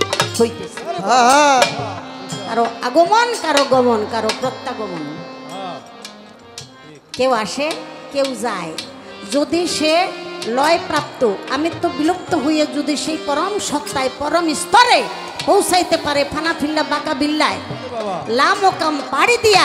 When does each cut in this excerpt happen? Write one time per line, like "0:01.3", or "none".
none